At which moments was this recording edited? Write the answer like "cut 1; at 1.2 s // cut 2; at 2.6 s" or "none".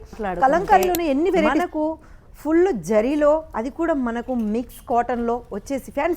cut 1; at 1.6 s